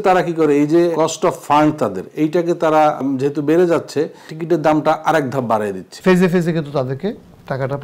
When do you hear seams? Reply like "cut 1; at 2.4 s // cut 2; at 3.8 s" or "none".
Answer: cut 1; at 0.9 s // cut 2; at 3.0 s // cut 3; at 4.3 s // cut 4; at 5.9 s